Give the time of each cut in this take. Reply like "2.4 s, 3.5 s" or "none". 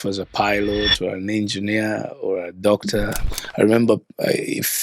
3.4 s